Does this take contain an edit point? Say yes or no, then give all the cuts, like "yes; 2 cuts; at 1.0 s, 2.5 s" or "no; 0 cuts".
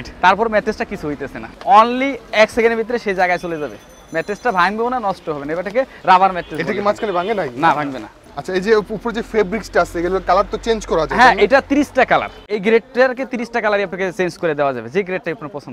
no; 0 cuts